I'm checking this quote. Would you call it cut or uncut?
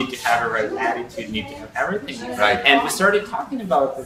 uncut